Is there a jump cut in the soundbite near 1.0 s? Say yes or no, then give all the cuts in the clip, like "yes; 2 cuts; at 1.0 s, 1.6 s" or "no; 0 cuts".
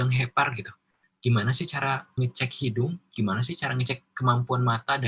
no; 0 cuts